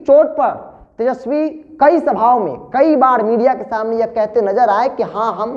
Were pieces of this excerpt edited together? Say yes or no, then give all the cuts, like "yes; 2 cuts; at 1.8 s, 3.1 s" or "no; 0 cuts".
no; 0 cuts